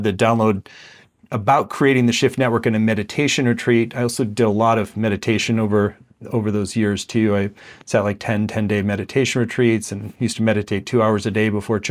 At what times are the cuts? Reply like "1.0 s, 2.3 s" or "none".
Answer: none